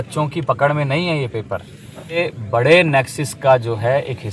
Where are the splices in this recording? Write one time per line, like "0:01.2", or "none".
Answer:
0:02.2